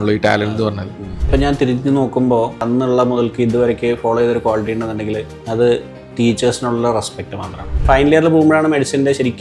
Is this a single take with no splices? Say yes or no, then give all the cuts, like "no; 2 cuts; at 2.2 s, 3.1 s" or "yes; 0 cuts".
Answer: no; 4 cuts; at 1.3 s, 2.6 s, 5.3 s, 7.8 s